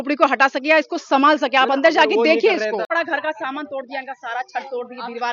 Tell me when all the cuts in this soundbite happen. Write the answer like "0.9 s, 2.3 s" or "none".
2.9 s